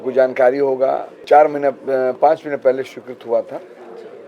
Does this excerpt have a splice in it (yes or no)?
yes